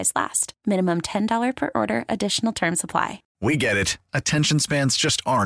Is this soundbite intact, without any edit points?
no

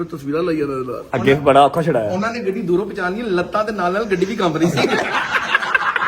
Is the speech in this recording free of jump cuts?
no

